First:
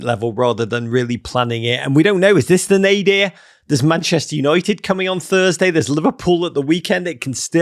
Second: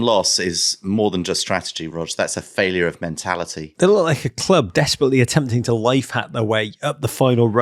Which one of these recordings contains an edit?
second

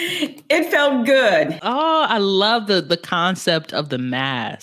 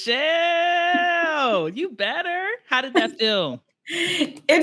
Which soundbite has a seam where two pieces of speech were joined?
first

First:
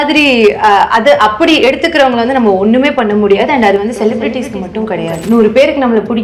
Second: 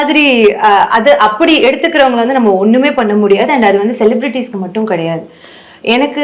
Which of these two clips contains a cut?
first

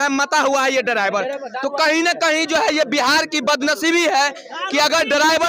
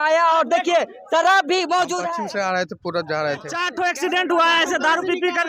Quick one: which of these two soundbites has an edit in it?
second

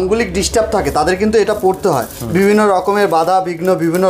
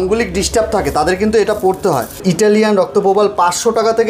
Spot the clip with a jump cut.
second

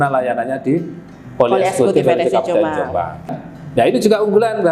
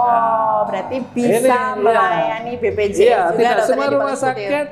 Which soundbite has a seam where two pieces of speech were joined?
first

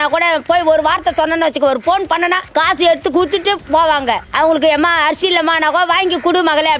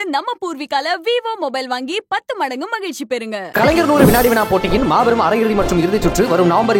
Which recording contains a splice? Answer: first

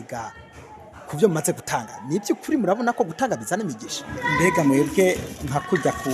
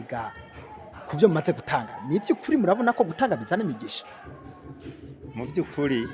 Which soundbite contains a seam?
first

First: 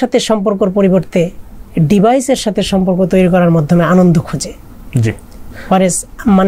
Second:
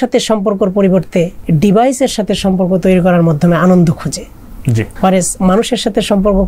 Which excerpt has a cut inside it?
second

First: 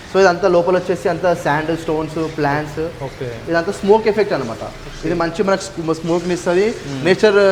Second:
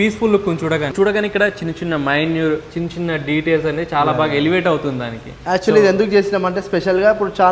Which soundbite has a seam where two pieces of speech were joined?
second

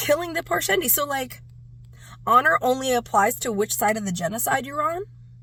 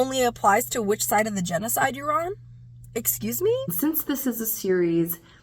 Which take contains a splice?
second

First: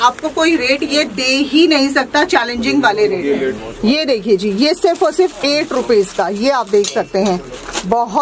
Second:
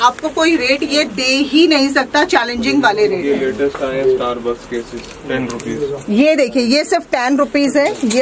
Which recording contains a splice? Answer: first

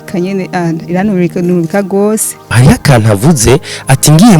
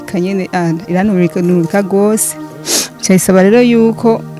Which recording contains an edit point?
first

